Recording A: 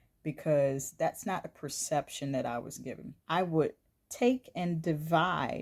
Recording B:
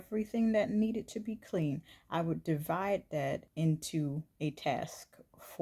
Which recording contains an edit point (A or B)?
A